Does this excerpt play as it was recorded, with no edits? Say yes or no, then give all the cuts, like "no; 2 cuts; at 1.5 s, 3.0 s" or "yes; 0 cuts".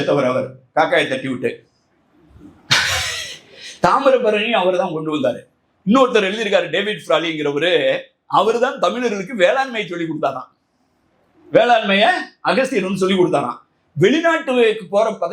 yes; 0 cuts